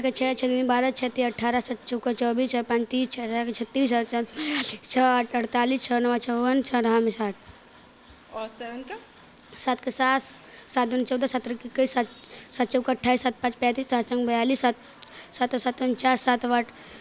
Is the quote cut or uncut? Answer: uncut